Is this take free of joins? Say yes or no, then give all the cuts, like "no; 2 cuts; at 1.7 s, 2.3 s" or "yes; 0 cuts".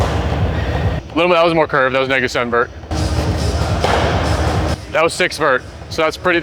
no; 3 cuts; at 1.0 s, 2.9 s, 4.8 s